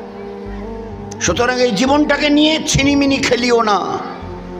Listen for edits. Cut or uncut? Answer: uncut